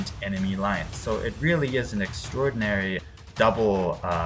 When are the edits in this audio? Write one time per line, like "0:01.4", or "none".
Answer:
0:03.0